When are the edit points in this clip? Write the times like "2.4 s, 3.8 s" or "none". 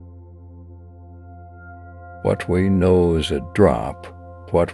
2.2 s